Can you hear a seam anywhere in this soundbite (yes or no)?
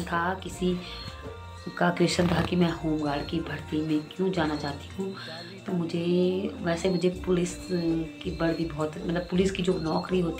no